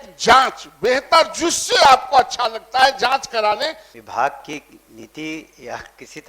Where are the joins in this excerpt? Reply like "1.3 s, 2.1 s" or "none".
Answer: 3.9 s